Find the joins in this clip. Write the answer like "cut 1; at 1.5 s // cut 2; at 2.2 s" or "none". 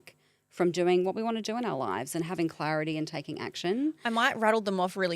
none